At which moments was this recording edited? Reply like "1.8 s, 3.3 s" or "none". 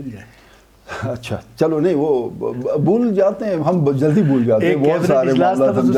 none